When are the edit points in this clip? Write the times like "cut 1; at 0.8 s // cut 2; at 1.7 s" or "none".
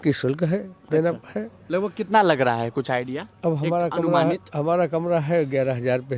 none